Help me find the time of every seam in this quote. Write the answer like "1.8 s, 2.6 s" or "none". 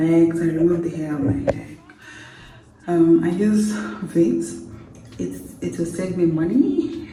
none

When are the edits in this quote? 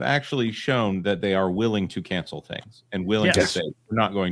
none

